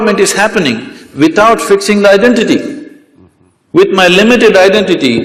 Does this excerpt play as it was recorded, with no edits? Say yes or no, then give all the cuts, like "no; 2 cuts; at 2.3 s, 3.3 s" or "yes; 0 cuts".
yes; 0 cuts